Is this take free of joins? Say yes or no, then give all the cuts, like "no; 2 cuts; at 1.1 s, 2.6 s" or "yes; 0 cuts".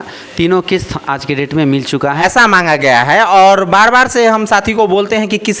no; 1 cut; at 2.2 s